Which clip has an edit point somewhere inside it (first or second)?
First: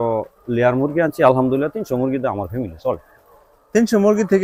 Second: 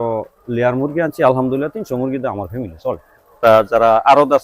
second